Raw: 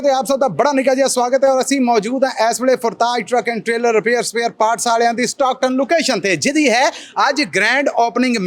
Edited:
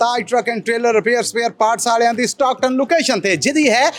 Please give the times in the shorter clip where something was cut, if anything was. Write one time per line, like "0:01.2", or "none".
none